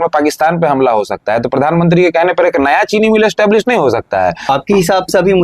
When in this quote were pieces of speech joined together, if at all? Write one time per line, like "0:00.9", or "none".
0:04.5